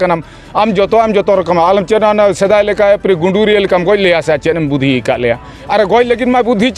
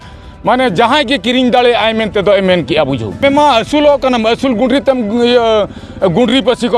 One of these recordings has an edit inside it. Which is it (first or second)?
second